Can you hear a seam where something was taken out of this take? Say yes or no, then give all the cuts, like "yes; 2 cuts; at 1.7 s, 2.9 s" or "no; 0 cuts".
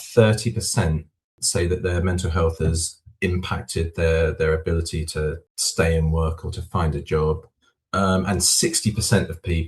yes; 1 cut; at 1.4 s